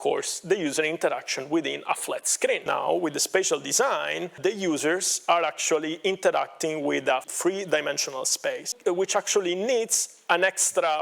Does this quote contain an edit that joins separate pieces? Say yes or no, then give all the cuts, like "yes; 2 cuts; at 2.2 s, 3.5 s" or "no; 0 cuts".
yes; 4 cuts; at 2.6 s, 4.4 s, 7.3 s, 8.7 s